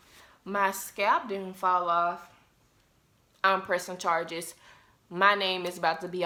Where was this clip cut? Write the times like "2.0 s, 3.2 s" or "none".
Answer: none